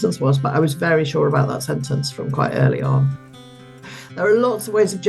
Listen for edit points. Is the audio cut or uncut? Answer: cut